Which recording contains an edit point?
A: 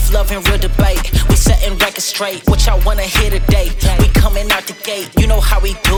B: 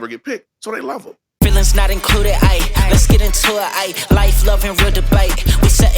B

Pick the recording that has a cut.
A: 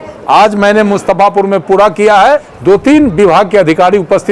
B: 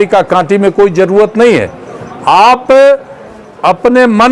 A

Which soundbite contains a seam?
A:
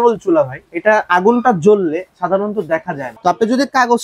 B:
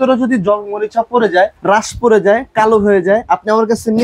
A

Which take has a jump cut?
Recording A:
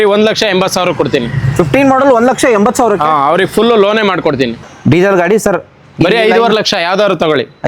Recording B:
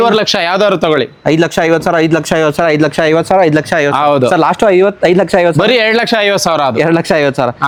A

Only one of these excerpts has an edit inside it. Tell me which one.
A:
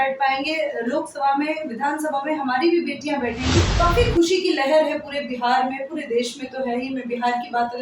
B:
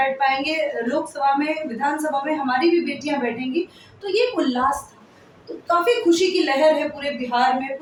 A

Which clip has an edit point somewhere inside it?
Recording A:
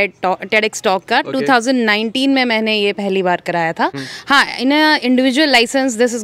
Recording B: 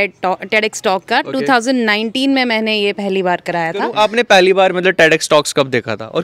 B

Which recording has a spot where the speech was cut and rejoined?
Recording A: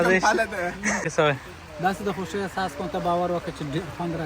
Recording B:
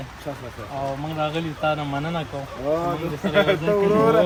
A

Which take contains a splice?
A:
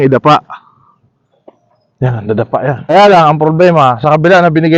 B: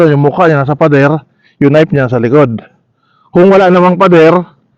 A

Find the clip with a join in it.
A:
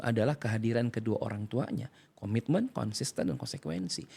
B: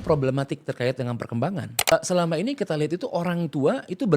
B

